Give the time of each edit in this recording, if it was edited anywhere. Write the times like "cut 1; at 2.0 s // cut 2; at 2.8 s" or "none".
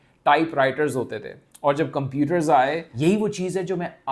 cut 1; at 2.9 s